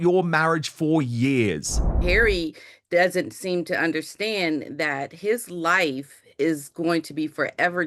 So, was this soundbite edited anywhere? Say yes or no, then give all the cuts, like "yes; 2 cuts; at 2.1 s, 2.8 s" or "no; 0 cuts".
yes; 1 cut; at 2.0 s